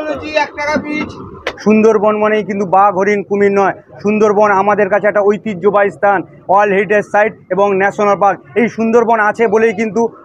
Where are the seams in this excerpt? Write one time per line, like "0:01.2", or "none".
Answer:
0:01.5